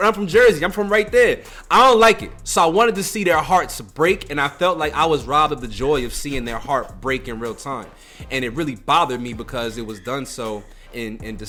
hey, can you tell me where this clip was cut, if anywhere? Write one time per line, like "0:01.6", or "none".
none